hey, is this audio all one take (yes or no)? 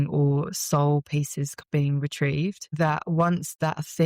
no